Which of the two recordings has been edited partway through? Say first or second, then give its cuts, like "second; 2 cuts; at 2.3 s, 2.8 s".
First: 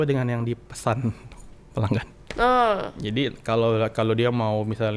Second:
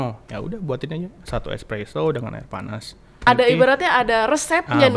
second; 1 cut; at 3.3 s